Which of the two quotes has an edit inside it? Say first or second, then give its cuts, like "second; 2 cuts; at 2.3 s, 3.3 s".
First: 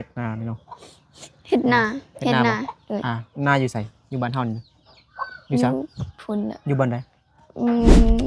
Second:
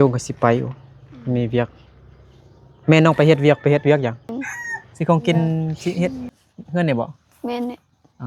second; 1 cut; at 4.3 s